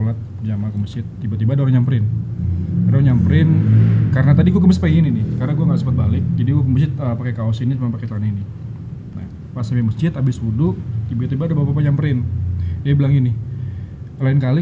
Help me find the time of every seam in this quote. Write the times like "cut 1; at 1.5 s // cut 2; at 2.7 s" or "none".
none